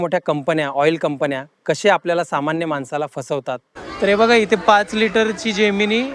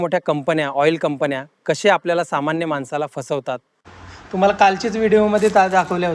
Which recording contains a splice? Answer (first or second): second